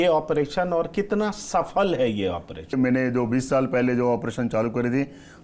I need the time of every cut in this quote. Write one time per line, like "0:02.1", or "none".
0:02.7